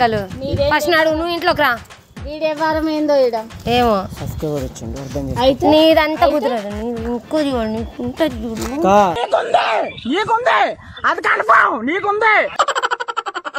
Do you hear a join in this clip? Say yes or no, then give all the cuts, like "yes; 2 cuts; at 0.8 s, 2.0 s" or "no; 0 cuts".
no; 0 cuts